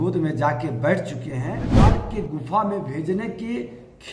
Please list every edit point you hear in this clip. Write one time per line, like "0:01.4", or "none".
0:01.7